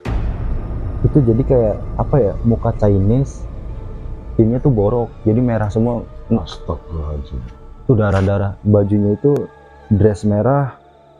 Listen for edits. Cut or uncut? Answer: cut